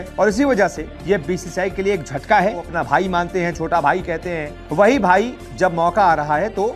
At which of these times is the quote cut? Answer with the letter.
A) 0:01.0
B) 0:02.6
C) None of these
B